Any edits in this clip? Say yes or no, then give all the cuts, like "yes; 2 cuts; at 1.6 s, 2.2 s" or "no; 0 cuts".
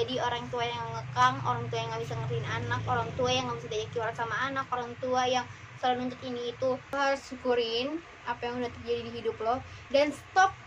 yes; 1 cut; at 6.9 s